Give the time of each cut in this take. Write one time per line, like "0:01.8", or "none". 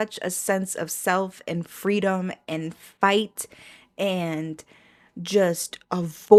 none